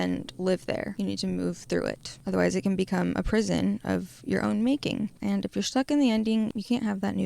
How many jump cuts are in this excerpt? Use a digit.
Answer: 4